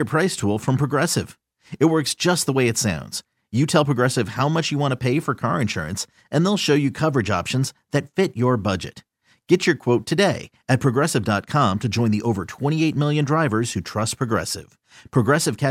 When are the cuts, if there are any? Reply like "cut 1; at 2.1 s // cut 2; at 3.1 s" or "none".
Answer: none